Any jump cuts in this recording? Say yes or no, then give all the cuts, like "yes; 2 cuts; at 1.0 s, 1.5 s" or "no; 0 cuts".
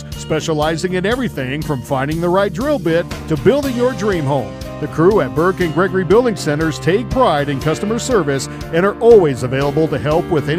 no; 0 cuts